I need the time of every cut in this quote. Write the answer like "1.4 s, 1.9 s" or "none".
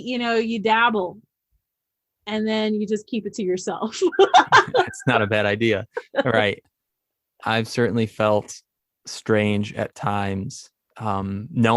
6.6 s